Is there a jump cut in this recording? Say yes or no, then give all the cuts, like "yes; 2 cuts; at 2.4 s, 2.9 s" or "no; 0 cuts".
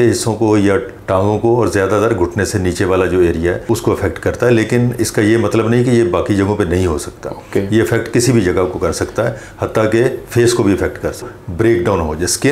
yes; 1 cut; at 11.3 s